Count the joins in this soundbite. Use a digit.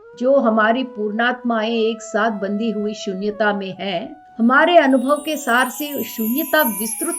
1